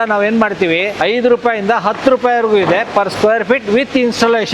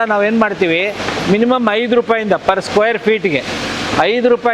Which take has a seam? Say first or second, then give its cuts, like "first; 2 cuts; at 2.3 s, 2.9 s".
first; 1 cut; at 1.0 s